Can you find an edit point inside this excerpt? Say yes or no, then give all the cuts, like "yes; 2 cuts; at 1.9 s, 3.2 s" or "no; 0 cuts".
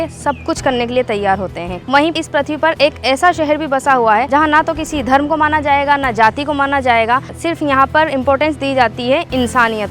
yes; 3 cuts; at 2.1 s, 4.3 s, 7.3 s